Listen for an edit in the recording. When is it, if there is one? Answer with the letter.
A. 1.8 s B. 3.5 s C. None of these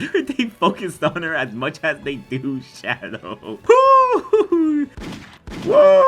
B